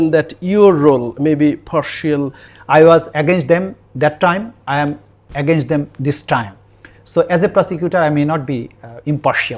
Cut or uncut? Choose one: cut